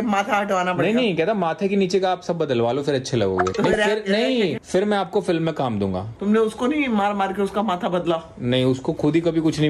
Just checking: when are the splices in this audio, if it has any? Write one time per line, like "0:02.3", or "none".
none

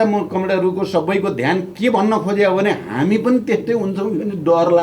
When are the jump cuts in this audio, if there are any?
none

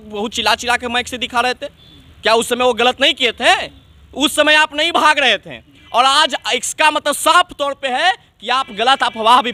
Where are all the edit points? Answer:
none

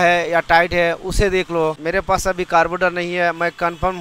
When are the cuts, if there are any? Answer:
0:01.8

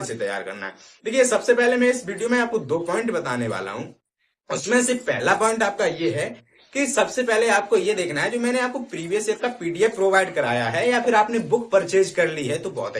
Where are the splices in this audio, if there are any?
none

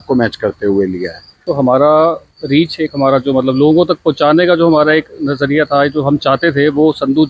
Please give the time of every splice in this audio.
0:01.5

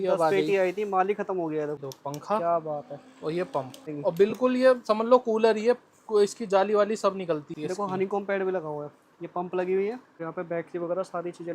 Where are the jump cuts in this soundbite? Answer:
0:01.8
0:03.9
0:07.5
0:10.2

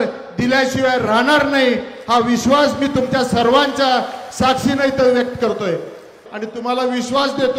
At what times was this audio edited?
0:06.2

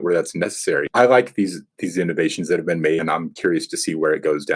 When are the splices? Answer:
0:00.9
0:03.0

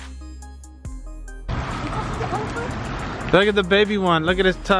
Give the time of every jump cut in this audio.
0:01.5

